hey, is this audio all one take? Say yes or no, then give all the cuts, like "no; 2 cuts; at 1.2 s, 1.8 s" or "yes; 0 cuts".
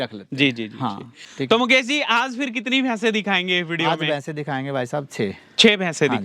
no; 1 cut; at 1.2 s